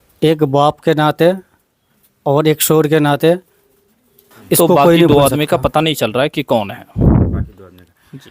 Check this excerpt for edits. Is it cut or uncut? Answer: cut